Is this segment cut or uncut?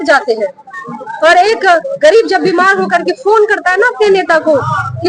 uncut